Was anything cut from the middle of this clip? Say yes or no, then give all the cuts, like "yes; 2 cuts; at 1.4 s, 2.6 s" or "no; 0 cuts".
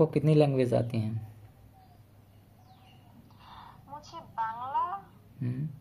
no; 0 cuts